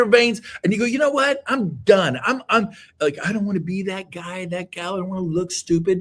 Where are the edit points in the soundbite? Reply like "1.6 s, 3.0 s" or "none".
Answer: none